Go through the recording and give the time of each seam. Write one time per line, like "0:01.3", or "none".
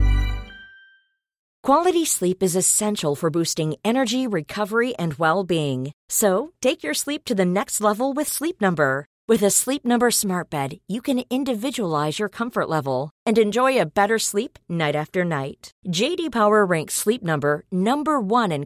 0:01.5